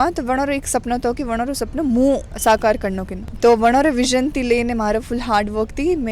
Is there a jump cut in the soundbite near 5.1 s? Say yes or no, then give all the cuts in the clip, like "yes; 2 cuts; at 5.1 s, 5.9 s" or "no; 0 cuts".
no; 0 cuts